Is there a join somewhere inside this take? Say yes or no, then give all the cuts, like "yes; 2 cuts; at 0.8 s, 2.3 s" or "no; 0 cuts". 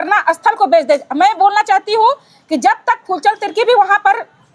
no; 0 cuts